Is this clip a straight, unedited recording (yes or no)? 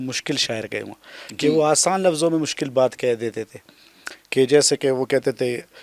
yes